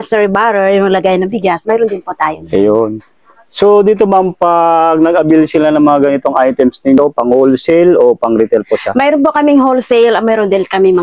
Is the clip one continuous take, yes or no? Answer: no